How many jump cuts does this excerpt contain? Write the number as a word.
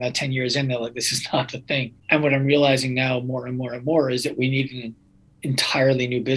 one